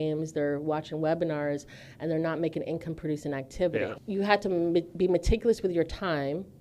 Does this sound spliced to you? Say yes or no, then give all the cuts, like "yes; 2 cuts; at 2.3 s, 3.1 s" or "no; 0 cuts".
yes; 1 cut; at 3.9 s